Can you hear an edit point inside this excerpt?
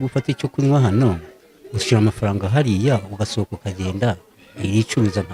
no; 0 cuts

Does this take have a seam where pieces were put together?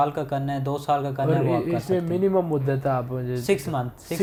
no; 0 cuts

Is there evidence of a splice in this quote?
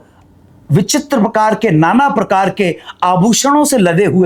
no; 0 cuts

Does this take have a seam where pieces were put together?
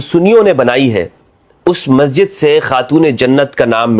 no; 0 cuts

